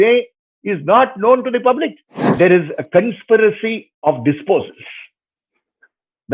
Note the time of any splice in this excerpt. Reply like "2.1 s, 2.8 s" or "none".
2.4 s